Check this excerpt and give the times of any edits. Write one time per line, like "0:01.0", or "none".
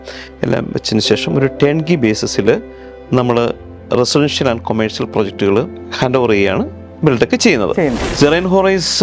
0:05.8
0:08.0